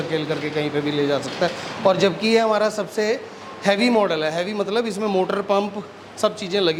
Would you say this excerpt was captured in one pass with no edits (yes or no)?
yes